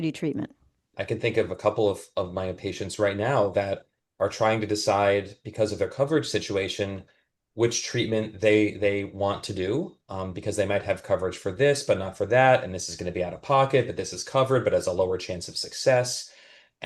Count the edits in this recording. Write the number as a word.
one